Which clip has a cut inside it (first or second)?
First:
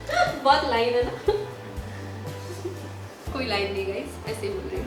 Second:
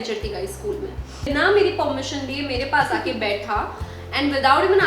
second